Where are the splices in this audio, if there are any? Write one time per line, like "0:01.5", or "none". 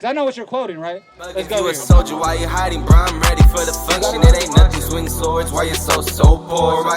0:01.6